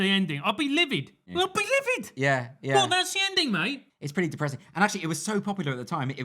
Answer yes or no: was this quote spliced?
no